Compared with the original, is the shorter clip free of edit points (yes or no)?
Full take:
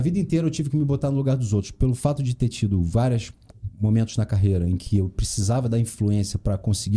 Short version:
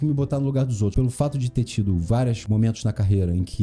no